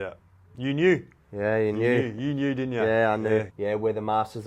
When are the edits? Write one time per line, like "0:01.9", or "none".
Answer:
0:03.5